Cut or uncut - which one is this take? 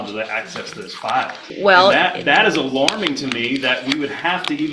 cut